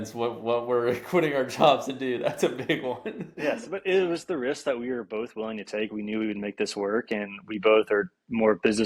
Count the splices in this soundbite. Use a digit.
0